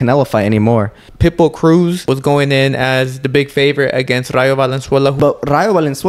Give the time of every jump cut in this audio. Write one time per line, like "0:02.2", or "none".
0:01.0
0:02.0
0:05.2